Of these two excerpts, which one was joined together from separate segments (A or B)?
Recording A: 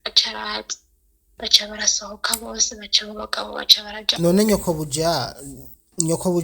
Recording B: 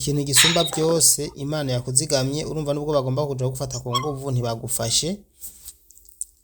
A